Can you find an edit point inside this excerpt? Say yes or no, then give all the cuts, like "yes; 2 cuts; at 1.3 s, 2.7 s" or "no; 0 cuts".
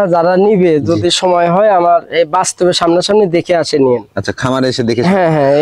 no; 0 cuts